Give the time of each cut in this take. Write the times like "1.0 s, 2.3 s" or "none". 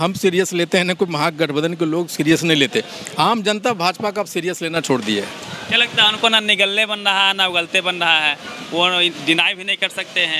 none